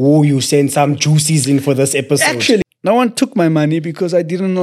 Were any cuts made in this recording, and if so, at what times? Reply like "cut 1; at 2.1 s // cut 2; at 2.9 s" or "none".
cut 1; at 2.7 s